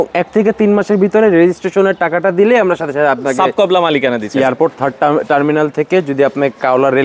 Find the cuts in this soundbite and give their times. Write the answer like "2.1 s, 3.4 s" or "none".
4.3 s